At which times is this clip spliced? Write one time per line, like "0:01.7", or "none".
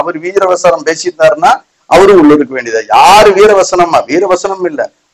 none